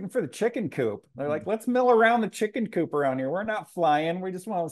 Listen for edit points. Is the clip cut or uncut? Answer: uncut